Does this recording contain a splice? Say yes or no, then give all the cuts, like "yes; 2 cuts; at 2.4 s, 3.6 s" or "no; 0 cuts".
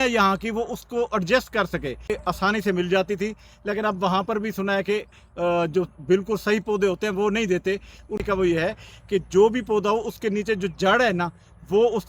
yes; 2 cuts; at 2.1 s, 8.2 s